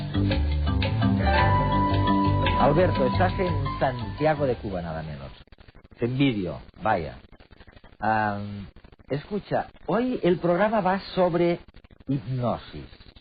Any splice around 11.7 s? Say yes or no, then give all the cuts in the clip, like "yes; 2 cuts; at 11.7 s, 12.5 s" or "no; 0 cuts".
no; 1 cut; at 5.5 s